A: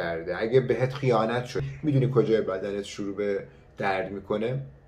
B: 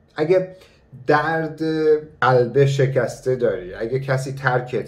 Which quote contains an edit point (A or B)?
A